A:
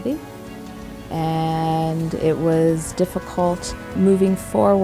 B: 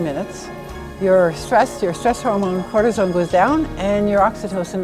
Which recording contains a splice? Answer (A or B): A